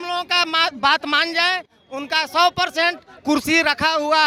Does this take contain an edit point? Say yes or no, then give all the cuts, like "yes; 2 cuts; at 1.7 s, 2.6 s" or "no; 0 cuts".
no; 0 cuts